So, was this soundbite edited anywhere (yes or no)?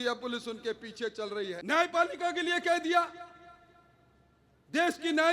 yes